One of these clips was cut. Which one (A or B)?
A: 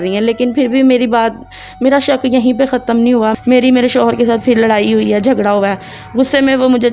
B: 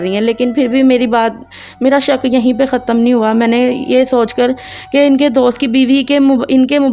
A